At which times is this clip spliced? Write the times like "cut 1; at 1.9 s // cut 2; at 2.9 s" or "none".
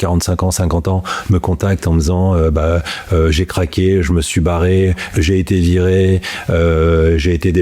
none